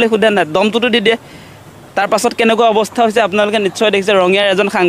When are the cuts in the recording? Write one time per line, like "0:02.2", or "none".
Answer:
none